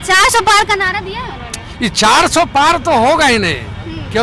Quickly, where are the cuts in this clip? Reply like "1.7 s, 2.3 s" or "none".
none